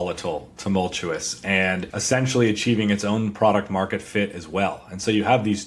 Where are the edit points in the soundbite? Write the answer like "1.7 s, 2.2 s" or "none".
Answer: 1.9 s